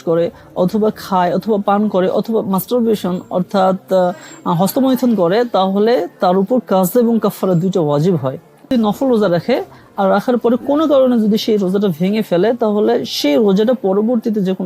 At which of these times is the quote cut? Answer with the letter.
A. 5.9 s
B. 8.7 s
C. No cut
B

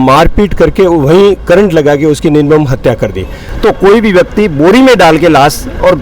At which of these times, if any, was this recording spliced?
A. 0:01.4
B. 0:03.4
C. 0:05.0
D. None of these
B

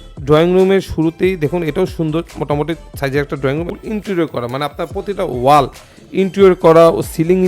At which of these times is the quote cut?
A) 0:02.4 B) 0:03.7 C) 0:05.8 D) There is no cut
B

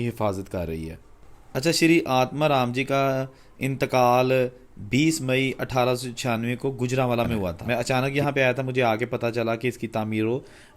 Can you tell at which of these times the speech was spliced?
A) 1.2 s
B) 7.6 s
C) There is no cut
B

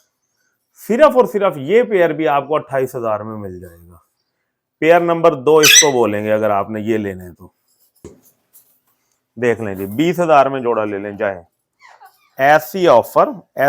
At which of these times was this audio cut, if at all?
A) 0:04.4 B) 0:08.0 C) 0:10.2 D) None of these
B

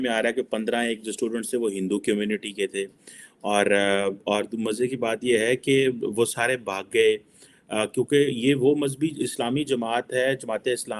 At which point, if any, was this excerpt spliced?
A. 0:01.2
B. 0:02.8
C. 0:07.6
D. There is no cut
D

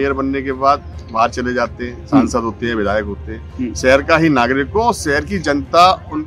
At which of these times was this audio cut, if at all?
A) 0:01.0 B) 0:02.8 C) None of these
C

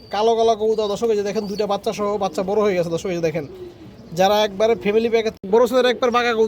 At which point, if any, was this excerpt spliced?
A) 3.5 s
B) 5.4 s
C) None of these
B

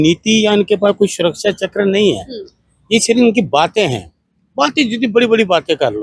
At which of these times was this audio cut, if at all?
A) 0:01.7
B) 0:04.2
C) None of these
C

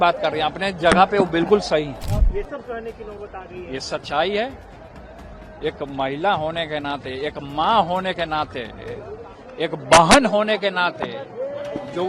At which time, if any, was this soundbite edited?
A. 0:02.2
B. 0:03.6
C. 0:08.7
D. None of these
A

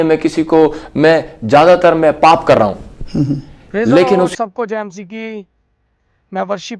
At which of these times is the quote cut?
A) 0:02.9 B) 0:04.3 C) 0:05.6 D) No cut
B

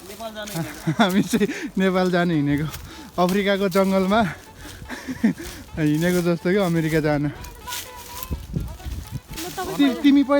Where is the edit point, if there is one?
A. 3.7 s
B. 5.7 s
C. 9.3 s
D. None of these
C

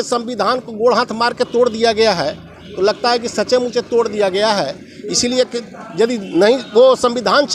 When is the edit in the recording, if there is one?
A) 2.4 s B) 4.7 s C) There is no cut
C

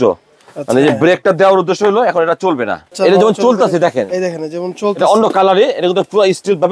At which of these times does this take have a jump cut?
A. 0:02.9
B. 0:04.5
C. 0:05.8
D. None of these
A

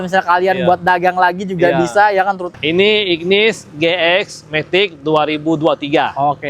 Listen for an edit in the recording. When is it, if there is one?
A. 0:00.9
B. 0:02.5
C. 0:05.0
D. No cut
B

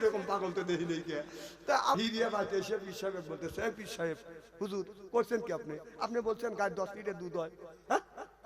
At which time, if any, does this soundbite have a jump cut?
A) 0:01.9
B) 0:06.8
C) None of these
A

